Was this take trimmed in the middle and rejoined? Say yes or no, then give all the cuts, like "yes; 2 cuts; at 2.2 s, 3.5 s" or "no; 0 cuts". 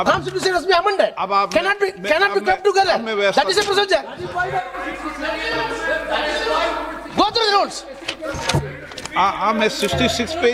no; 0 cuts